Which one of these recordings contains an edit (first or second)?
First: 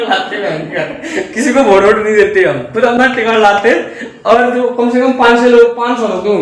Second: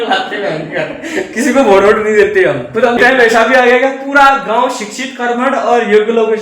second